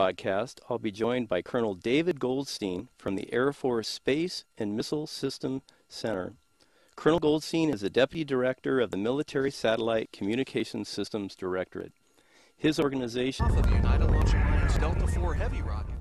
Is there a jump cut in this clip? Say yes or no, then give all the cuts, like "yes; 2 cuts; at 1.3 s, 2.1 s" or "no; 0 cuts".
no; 0 cuts